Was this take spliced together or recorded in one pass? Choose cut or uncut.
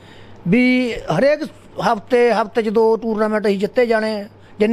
uncut